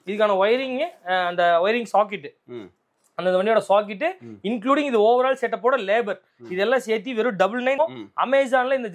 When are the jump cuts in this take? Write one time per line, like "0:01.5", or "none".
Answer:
0:07.8